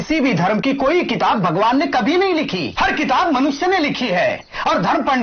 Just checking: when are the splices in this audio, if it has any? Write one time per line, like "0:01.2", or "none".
0:02.6